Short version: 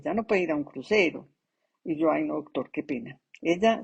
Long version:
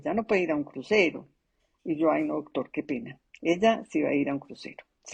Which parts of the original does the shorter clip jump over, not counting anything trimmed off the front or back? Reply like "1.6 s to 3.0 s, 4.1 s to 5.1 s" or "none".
none